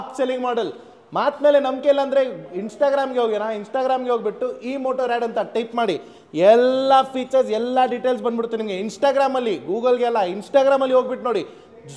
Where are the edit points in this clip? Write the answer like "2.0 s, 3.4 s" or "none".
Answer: none